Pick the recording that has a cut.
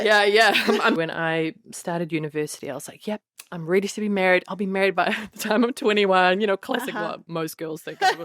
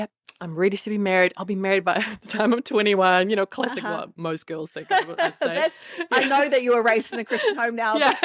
first; 1 cut; at 1.0 s

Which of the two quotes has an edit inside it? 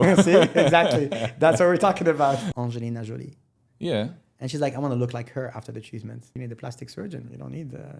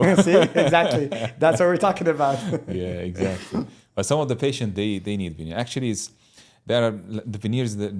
first; 2 cuts; at 2.5 s, 6.3 s

